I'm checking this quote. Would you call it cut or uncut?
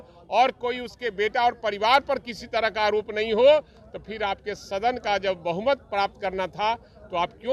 uncut